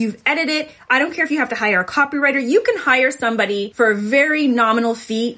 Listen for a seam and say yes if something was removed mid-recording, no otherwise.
yes